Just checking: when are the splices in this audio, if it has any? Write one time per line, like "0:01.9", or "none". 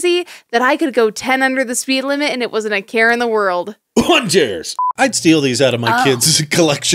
0:04.9